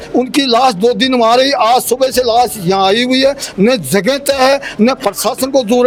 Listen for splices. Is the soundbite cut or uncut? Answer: uncut